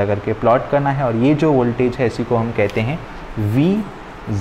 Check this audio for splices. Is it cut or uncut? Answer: uncut